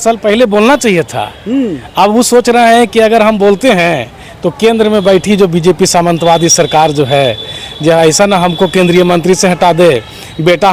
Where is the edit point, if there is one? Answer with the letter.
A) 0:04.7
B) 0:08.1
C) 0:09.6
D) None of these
D